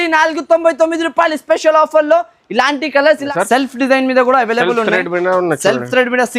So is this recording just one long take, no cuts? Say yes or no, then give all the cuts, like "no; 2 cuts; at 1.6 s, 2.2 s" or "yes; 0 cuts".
no; 1 cut; at 3.3 s